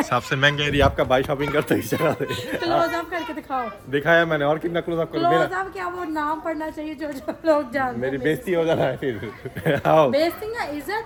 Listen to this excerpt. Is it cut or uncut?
uncut